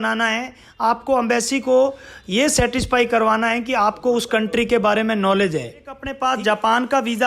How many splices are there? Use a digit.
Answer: 1